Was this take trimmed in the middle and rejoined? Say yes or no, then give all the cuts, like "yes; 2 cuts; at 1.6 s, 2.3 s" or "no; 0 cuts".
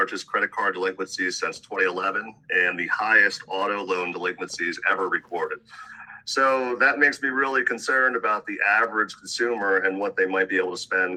no; 0 cuts